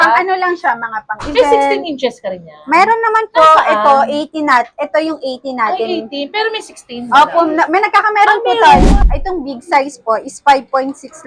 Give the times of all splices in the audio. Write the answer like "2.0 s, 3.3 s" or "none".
8.8 s